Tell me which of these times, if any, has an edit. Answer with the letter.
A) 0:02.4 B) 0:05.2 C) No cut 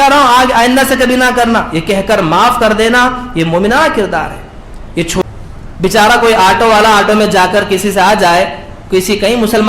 B